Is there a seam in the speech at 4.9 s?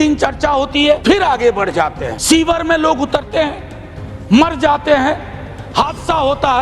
no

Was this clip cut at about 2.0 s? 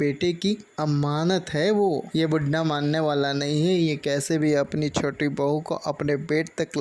no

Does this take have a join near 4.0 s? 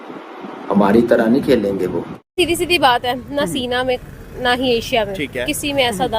no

